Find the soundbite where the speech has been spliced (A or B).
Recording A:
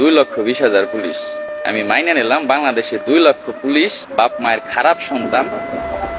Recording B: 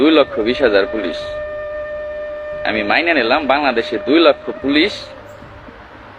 A